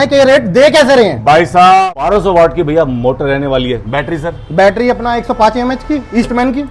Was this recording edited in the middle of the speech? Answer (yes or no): yes